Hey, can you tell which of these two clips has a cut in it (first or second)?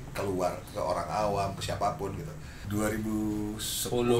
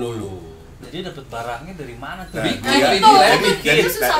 first